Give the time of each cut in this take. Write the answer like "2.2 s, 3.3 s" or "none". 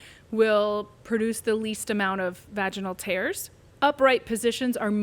3.6 s